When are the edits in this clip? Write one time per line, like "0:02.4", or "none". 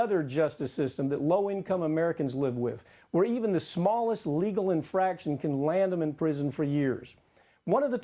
0:06.8